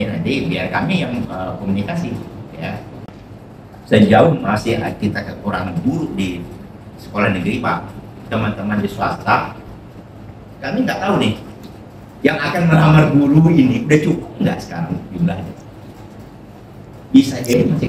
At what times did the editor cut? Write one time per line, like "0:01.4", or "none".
0:03.1